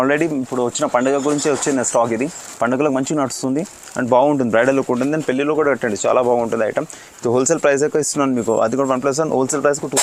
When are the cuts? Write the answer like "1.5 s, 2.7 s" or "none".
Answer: none